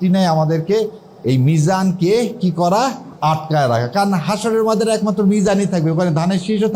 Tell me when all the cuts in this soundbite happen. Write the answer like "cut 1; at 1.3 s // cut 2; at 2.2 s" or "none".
none